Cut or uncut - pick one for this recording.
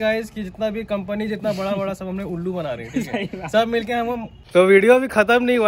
cut